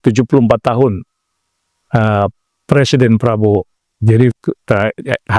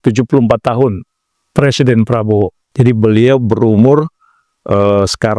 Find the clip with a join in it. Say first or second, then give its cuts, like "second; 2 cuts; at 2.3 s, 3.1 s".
second; 2 cuts; at 1.3 s, 2.6 s